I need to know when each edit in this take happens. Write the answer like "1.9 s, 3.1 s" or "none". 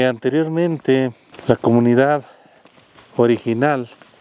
1.3 s